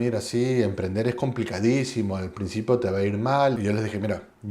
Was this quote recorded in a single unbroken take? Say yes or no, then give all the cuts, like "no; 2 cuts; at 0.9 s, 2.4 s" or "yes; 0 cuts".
no; 1 cut; at 3.6 s